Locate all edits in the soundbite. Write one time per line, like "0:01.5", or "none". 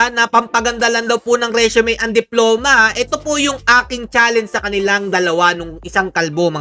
none